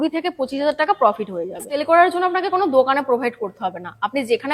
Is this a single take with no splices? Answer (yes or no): no